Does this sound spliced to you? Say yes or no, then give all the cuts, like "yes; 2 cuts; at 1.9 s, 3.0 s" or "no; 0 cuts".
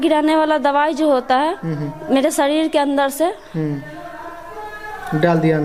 no; 0 cuts